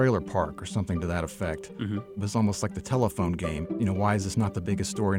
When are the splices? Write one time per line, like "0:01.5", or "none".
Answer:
0:02.2
0:03.7